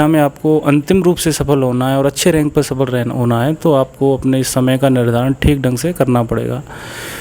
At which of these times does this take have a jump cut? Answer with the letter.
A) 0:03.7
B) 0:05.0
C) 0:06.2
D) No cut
D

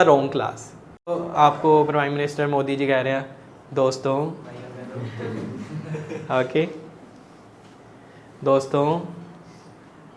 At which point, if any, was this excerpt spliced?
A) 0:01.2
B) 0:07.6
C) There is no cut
A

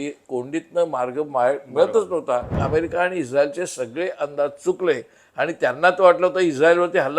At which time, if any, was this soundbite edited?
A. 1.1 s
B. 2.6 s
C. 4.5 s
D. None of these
B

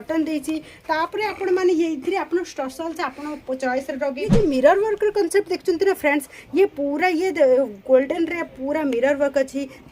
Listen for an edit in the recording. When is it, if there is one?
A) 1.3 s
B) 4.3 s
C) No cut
B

